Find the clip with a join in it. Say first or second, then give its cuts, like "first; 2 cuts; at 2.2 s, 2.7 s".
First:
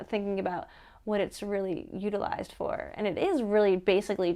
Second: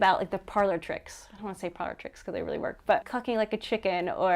second; 1 cut; at 3.1 s